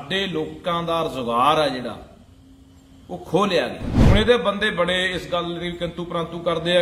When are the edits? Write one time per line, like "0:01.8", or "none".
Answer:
0:03.9